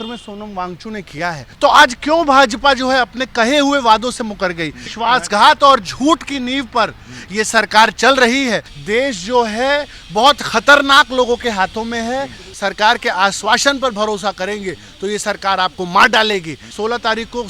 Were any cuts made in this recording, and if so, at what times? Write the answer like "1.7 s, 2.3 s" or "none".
1.4 s, 4.9 s, 8.7 s, 12.5 s, 16.6 s